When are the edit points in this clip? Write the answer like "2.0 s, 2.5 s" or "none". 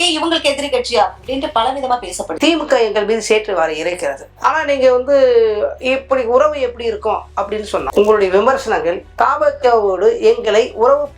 2.3 s, 4.3 s, 7.9 s